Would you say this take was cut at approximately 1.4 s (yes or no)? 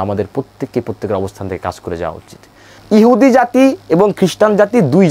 no